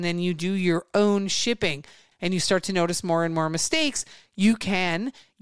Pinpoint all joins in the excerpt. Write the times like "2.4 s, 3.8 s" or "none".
none